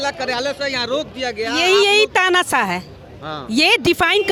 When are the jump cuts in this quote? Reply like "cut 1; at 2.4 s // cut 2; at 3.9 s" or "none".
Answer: none